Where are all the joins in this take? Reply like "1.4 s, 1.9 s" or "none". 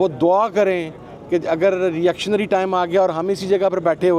none